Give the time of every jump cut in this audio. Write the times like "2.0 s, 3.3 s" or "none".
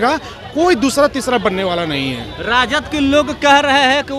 none